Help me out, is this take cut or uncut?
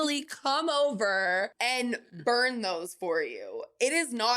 cut